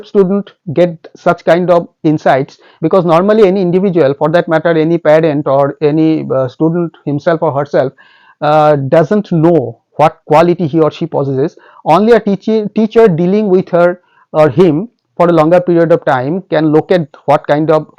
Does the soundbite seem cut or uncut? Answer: uncut